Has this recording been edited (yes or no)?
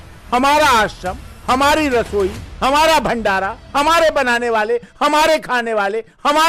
no